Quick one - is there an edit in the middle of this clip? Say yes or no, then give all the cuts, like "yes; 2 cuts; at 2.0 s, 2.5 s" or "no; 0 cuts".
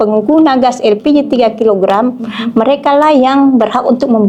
no; 0 cuts